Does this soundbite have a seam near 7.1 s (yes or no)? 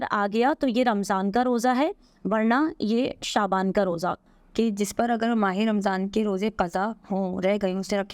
no